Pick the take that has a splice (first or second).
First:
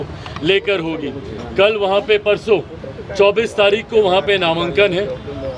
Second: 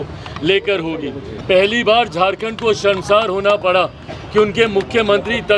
second